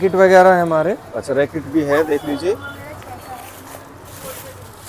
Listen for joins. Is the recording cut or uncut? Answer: uncut